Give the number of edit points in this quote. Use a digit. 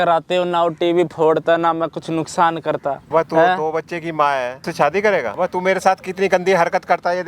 3